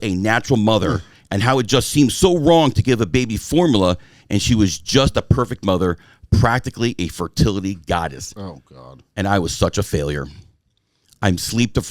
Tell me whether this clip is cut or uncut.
uncut